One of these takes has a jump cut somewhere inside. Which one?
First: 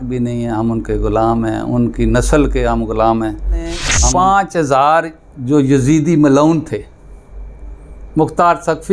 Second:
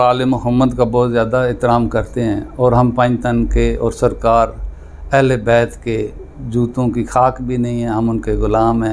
first; 1 cut; at 3.9 s

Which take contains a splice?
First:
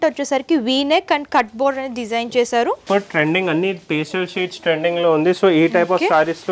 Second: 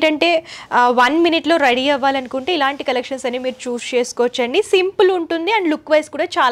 first; 1 cut; at 2.8 s

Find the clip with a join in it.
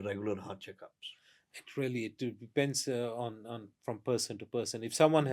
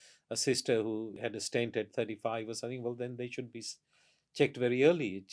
second; 1 cut; at 1.1 s

